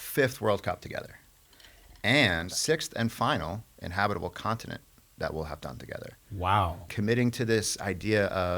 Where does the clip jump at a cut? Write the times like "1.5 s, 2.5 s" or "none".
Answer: 2.5 s, 6.9 s